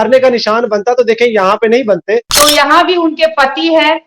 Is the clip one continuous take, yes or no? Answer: no